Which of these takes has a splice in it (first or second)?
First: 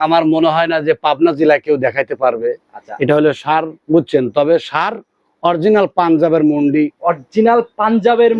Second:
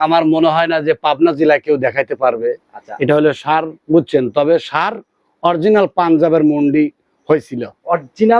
first